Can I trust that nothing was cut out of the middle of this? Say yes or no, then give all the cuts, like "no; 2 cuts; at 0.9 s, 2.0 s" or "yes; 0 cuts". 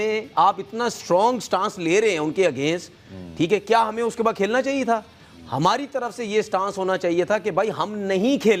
yes; 0 cuts